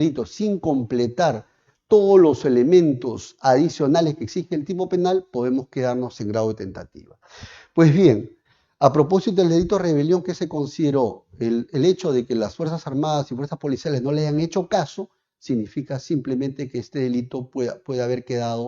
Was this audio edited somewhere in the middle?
no; 0 cuts

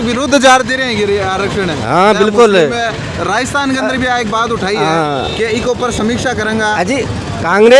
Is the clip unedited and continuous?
yes; 0 cuts

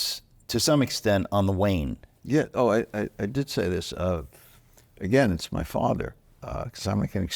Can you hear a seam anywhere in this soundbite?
no; 0 cuts

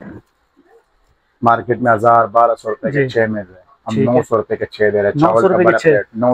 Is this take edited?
no; 0 cuts

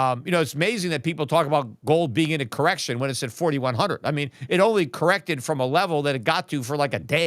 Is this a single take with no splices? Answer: yes; 0 cuts

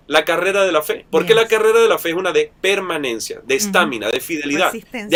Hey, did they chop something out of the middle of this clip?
no; 0 cuts

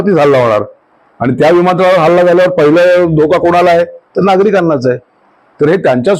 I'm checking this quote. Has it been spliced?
no; 0 cuts

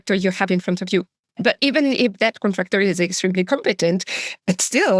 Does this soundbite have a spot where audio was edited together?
yes; 1 cut; at 1.5 s

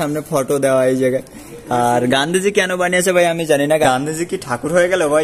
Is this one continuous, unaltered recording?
no; 1 cut; at 3.8 s

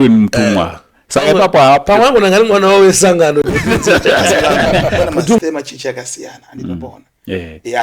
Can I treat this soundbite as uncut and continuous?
no; 1 cut; at 5.4 s

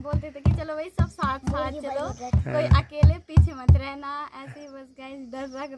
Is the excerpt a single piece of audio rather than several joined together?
yes; 0 cuts

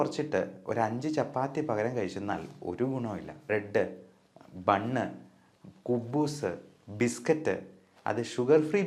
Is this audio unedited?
no; 1 cut; at 3.5 s

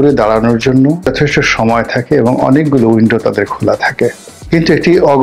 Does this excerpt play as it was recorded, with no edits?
no; 2 cuts; at 1.1 s, 4.3 s

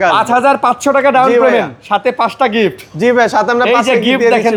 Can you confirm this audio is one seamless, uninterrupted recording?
yes; 0 cuts

